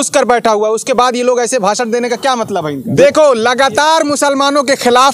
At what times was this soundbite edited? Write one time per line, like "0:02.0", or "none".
0:02.8